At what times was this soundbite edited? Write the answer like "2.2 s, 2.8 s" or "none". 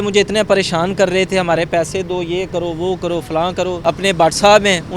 3.8 s